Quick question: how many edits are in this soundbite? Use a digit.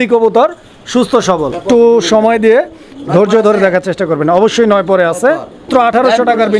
2